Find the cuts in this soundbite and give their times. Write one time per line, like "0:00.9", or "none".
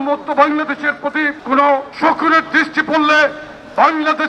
0:01.4
0:01.9